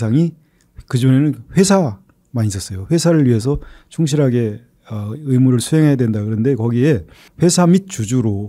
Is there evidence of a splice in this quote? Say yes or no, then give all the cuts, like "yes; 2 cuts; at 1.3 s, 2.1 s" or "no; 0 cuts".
yes; 1 cut; at 7.2 s